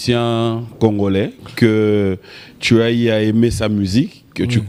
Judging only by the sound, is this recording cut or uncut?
uncut